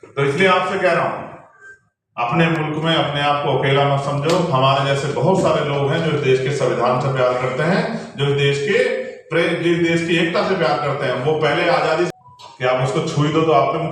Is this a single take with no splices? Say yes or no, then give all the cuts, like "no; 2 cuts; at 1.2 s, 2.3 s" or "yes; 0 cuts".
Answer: no; 1 cut; at 12.1 s